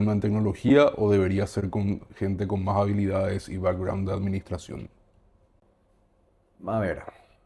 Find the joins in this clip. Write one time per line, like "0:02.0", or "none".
none